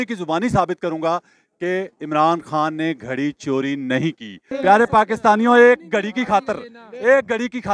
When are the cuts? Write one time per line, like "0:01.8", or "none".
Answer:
0:04.4